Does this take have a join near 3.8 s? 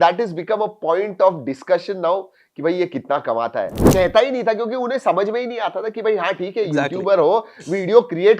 yes; 1 cut; at 3.8 s

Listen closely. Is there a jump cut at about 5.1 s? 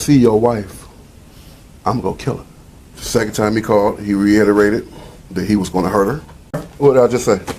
no; 1 cut; at 6.6 s

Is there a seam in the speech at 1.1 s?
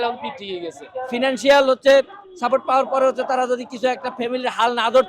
yes; 1 cut; at 1.1 s

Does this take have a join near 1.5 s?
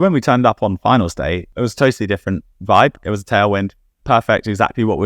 yes; 2 cuts; at 1.5 s, 3.0 s

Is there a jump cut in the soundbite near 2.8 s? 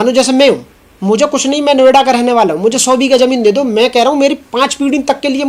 no; 0 cuts

